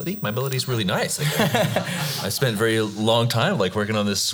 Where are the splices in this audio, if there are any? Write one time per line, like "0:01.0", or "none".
none